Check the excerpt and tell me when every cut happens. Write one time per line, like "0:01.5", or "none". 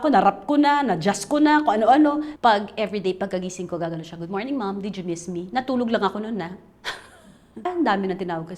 0:02.3
0:07.6